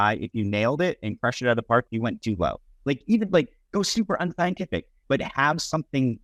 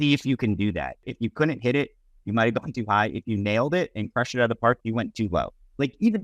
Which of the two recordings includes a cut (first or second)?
second